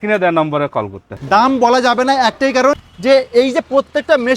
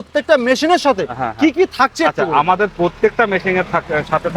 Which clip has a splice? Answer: first; 2 cuts; at 1.2 s, 2.8 s

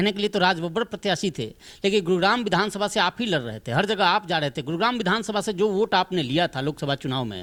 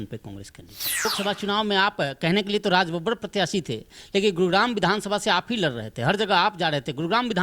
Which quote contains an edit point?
second; 1 cut; at 1.1 s

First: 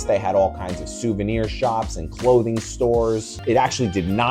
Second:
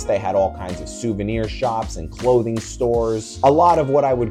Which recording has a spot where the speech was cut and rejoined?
first; 1 cut; at 3.3 s

